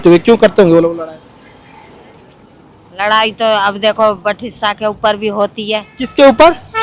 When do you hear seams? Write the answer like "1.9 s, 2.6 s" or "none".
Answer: none